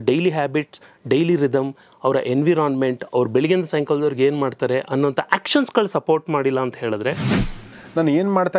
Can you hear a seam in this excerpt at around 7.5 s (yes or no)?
yes